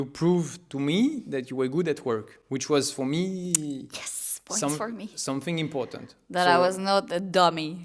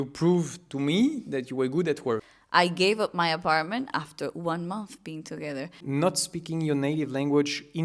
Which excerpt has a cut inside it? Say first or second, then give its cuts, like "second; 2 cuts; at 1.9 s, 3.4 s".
second; 2 cuts; at 2.3 s, 5.8 s